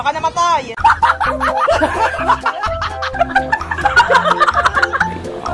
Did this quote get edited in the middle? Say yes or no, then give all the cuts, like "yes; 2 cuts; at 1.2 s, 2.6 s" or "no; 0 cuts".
no; 0 cuts